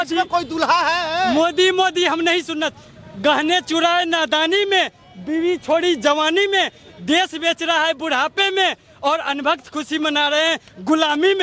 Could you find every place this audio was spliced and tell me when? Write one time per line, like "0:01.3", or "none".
none